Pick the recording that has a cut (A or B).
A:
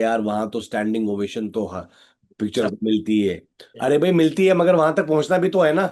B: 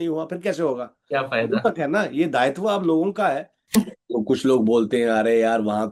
B